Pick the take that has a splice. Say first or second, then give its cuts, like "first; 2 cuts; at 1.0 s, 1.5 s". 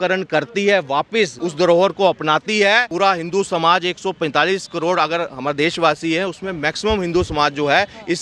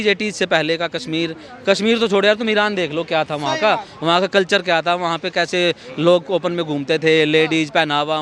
first; 2 cuts; at 1.4 s, 2.9 s